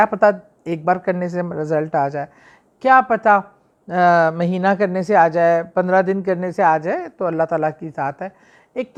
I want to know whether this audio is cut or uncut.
uncut